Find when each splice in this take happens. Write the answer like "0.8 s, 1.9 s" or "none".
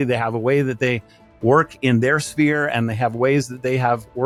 none